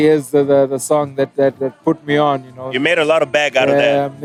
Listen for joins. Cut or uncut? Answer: uncut